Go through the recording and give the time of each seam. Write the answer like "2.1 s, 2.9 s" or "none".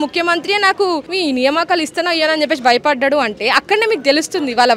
none